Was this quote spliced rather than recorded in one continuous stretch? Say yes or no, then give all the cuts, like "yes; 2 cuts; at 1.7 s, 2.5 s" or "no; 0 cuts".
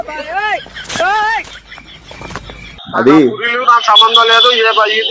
yes; 1 cut; at 2.7 s